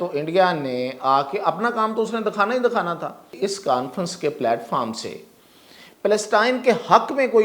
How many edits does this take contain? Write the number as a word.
one